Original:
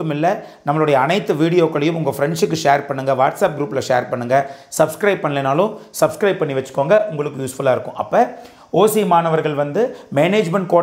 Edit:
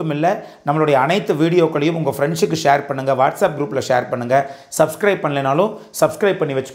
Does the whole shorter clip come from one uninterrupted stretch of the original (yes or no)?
yes